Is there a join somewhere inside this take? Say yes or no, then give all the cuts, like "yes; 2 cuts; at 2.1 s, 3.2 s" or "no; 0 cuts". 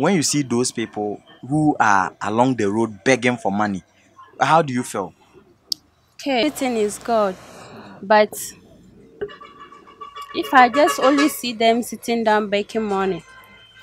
yes; 1 cut; at 6.4 s